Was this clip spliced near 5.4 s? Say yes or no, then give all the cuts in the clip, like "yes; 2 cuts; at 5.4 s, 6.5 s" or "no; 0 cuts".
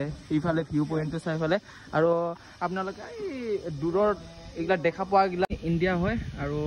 yes; 1 cut; at 5.4 s